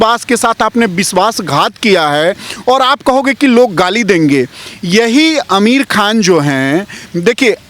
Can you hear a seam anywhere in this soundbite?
no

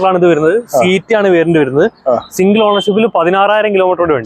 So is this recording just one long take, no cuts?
yes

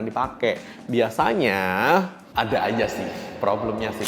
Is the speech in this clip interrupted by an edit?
no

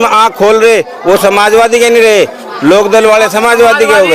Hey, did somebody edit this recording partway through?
no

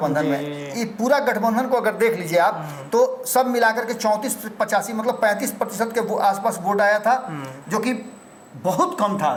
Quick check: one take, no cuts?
yes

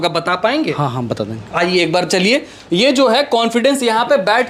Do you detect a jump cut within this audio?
no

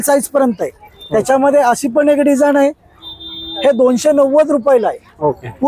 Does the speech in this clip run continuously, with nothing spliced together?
yes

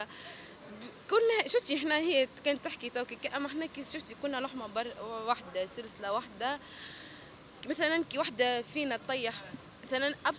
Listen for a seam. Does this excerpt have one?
no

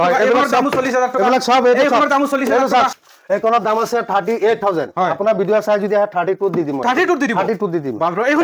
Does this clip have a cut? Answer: yes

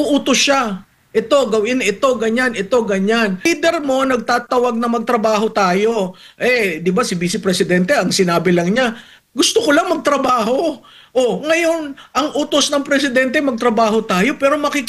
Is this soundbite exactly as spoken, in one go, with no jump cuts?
no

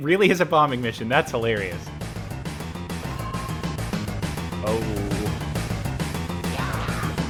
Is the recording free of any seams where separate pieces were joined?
yes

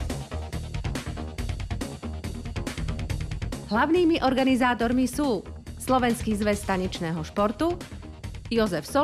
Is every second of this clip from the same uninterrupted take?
no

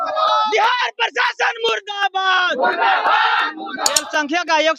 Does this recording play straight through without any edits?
no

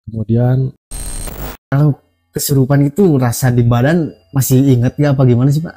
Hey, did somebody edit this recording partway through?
yes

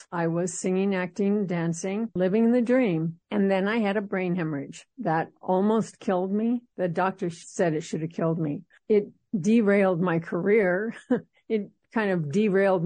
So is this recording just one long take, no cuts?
no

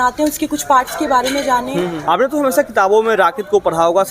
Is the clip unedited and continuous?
no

